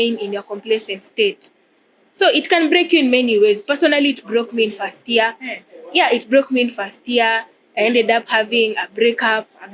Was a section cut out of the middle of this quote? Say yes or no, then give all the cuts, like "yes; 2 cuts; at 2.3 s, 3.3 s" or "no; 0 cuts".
no; 0 cuts